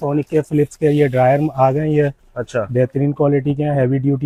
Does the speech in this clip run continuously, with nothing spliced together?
yes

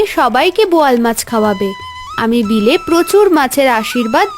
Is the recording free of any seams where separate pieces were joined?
yes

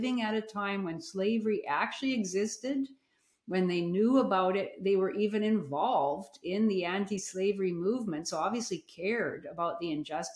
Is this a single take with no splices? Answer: yes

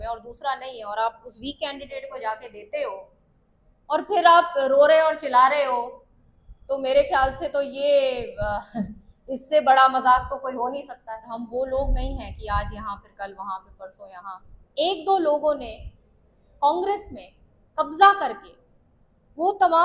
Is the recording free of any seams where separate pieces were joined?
no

